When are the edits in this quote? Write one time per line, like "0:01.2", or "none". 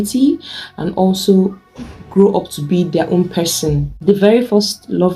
0:03.9